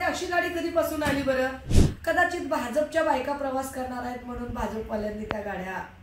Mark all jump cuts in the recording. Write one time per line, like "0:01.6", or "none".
0:01.8